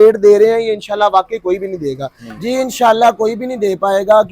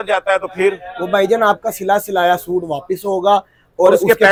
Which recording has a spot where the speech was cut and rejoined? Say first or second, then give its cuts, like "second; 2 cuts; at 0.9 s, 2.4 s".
first; 1 cut; at 2.3 s